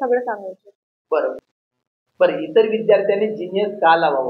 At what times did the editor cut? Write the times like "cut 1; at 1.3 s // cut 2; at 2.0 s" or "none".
cut 1; at 1.4 s